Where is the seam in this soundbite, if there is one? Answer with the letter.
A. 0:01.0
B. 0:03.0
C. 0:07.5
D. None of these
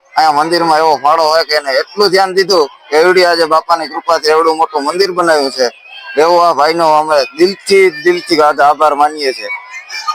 D